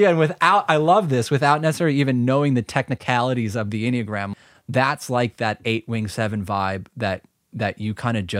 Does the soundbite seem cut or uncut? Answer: cut